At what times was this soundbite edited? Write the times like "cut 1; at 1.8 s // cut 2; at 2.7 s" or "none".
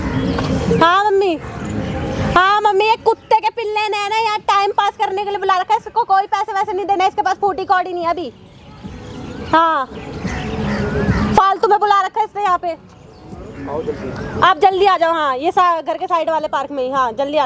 none